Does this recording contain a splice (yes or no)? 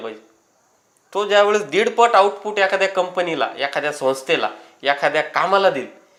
no